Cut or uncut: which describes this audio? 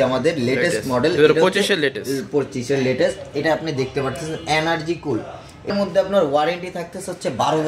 cut